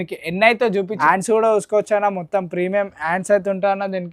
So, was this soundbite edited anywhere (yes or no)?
yes